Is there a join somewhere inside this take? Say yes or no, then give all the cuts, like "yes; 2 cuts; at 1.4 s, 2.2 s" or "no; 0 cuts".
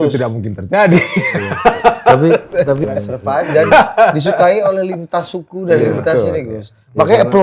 yes; 1 cut; at 2.9 s